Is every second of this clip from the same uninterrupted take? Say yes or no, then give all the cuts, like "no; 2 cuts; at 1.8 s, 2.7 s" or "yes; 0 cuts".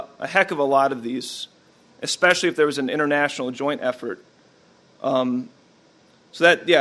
yes; 0 cuts